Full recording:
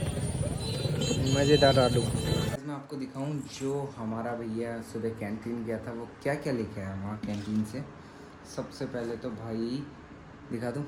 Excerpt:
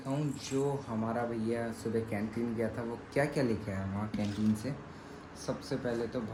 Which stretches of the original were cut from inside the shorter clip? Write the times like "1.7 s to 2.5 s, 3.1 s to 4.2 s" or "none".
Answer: none

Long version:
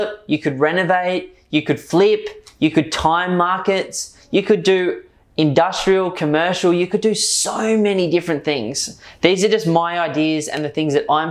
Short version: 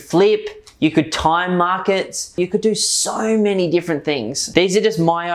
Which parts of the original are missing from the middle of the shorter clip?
4.2 s to 6.8 s, 8.7 s to 9.0 s

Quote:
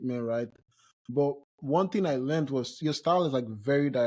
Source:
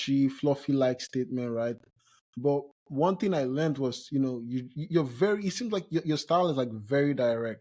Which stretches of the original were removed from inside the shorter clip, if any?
4.1 s to 6.0 s

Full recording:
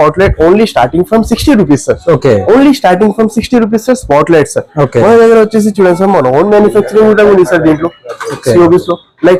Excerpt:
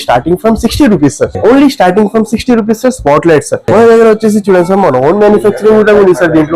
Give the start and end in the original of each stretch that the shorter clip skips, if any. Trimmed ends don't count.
2.0 s to 2.4 s, 4.7 s to 4.9 s

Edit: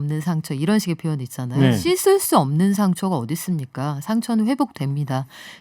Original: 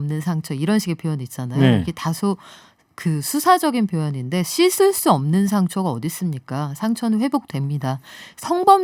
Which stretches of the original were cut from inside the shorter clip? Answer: 1.8 s to 4.5 s

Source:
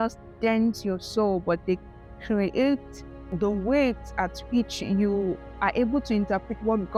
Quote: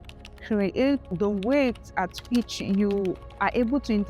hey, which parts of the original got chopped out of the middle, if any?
2.9 s to 3.3 s

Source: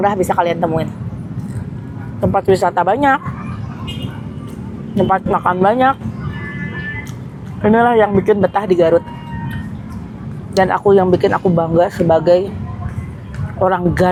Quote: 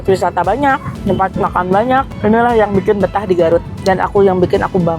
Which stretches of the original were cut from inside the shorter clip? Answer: 3.3 s to 4.8 s, 6.0 s to 7.5 s, 9.1 s to 10.4 s

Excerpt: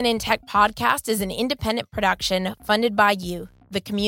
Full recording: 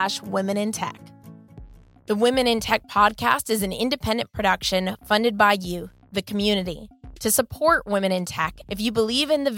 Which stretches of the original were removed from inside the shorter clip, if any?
none

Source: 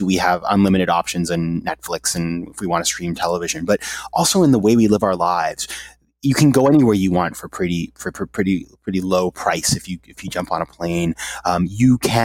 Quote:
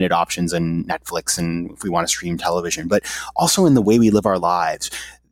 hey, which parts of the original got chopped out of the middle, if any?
none

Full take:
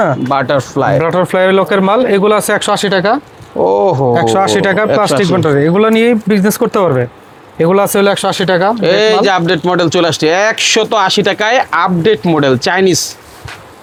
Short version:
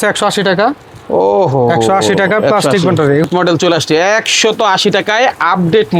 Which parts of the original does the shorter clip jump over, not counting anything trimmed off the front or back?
5.7 s to 9.6 s

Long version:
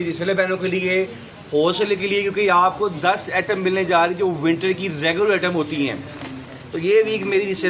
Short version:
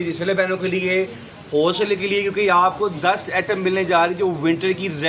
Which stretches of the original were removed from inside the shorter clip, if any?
none

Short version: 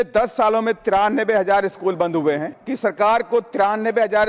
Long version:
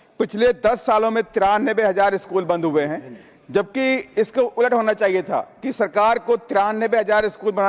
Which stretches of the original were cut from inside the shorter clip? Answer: 3.1 s to 5.6 s

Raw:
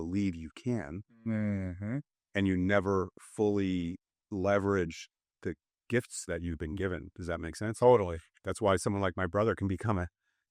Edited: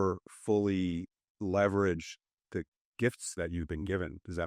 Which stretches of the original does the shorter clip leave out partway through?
none

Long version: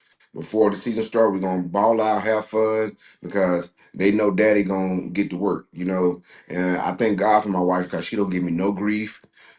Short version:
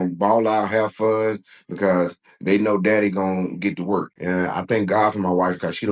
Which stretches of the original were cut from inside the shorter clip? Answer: 5.7 s to 6.4 s

